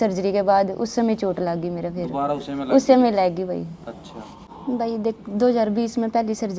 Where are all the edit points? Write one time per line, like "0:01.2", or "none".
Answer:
0:04.4